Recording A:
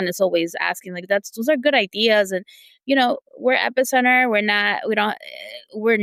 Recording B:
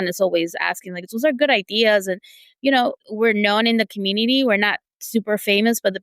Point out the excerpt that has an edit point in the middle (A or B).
B